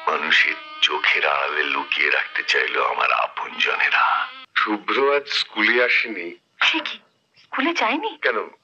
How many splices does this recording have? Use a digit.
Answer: 1